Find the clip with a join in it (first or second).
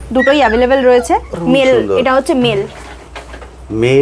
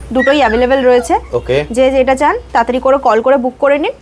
first